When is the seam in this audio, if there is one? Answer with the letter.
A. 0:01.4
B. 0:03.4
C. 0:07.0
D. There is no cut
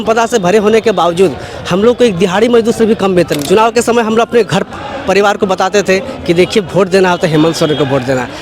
B